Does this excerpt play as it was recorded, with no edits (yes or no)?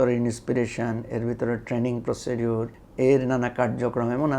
no